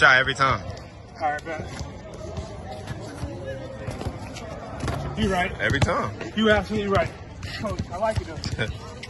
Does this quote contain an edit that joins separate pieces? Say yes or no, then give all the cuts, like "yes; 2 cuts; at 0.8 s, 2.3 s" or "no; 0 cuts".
yes; 2 cuts; at 2.0 s, 7.6 s